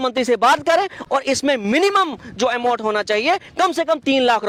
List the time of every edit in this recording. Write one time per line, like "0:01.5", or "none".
none